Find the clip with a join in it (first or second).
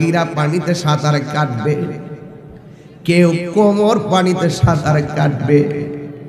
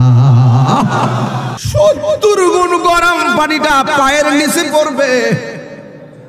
second